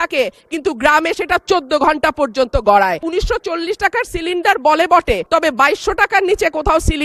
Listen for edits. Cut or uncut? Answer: cut